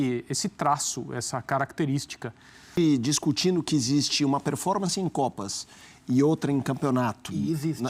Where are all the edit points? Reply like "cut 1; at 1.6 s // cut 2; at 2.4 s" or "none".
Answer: cut 1; at 2.7 s